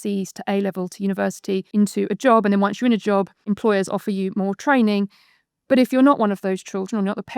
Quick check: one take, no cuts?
no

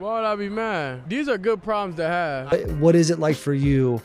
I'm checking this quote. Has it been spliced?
yes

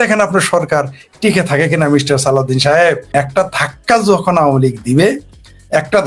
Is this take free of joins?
no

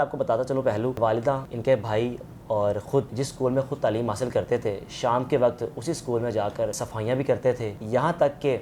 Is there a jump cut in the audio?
yes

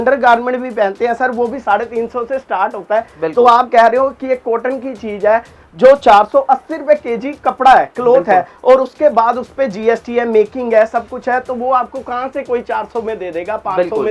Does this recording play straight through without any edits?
yes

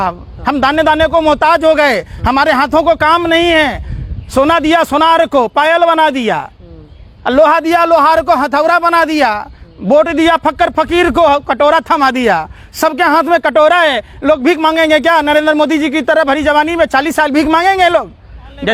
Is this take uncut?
yes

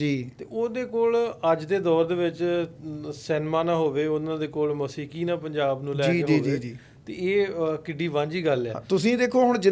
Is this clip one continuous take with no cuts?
yes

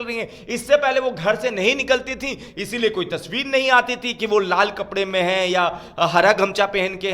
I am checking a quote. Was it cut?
no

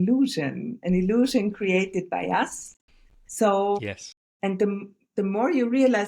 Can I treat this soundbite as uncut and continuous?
yes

